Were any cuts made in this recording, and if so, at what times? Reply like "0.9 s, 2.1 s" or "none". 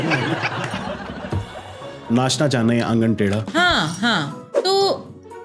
2.0 s, 4.4 s